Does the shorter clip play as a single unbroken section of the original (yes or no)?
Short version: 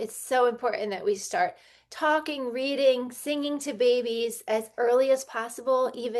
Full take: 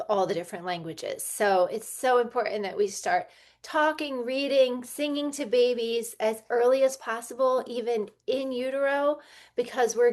yes